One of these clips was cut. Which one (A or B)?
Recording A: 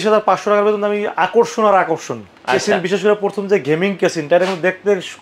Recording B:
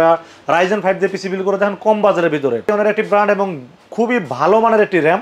B